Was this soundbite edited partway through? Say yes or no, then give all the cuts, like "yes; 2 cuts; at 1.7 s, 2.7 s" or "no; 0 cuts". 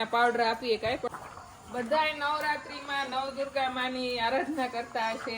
yes; 1 cut; at 1.0 s